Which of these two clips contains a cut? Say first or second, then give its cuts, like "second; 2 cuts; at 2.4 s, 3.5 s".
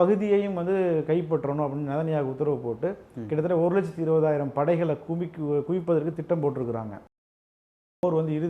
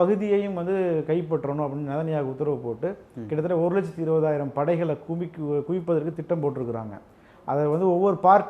first; 1 cut; at 7.5 s